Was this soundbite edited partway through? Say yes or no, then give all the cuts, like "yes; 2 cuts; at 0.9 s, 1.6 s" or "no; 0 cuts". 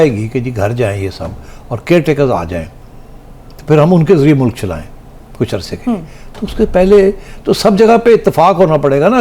no; 0 cuts